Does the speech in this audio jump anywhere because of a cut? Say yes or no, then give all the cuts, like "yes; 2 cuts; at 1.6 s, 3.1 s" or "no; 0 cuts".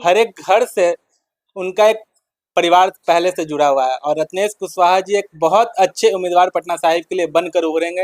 no; 0 cuts